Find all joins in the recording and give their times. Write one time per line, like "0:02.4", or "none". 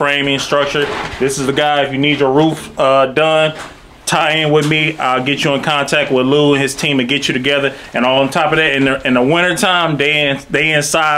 none